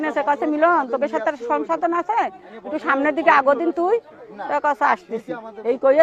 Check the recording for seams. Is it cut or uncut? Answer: uncut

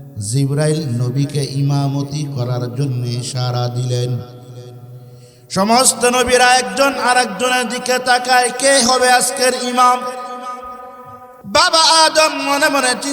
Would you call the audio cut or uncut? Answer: cut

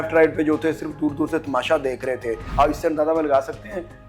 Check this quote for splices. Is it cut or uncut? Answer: cut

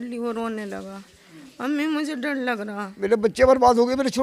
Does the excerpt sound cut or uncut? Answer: cut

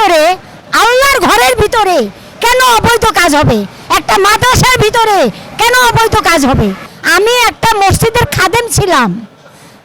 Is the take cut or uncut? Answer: uncut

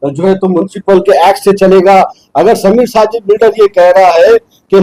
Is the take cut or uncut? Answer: uncut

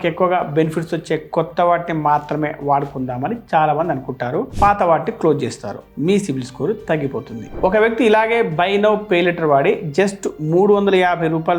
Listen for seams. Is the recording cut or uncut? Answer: cut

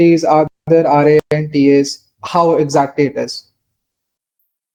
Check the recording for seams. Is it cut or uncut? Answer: uncut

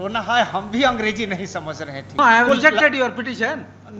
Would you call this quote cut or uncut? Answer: cut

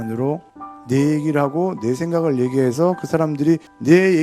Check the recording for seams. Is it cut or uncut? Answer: uncut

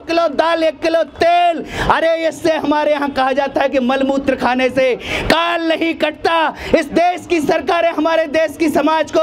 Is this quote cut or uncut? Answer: uncut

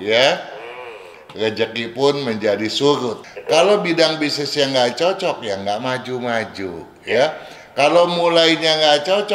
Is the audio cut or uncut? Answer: cut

